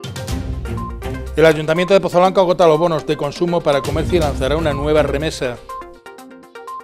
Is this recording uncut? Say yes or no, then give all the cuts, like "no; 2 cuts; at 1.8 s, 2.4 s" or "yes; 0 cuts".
no; 2 cuts; at 1.3 s, 5.6 s